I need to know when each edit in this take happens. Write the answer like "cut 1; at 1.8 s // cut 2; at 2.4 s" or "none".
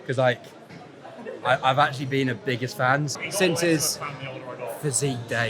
cut 1; at 3.1 s